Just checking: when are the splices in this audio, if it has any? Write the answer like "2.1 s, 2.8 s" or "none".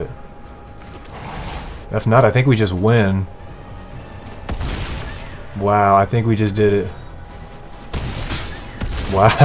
1.8 s, 3.4 s, 7.2 s